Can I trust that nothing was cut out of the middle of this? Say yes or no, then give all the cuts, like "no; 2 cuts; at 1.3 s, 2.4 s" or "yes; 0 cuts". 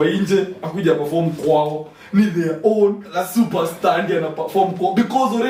yes; 0 cuts